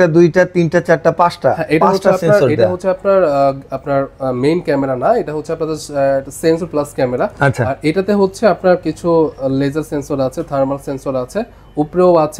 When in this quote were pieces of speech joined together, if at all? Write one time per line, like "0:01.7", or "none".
none